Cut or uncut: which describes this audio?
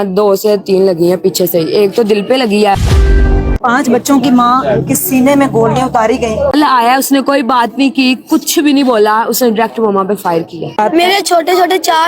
cut